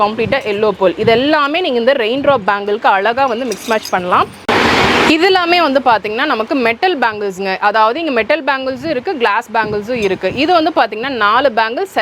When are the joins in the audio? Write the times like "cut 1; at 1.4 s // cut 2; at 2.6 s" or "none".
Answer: cut 1; at 4.4 s